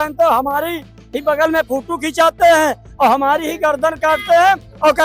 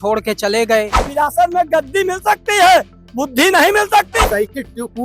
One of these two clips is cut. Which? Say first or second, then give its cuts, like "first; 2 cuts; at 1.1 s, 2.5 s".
second; 2 cuts; at 1.0 s, 4.2 s